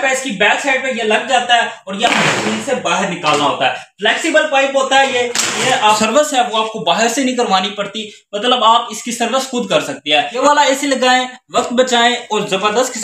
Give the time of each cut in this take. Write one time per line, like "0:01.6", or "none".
0:06.0
0:10.3